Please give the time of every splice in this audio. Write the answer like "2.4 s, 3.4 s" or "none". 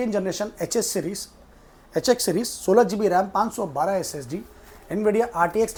none